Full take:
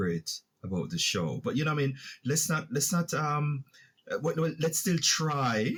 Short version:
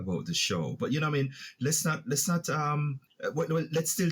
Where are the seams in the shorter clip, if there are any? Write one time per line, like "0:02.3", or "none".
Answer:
0:03.0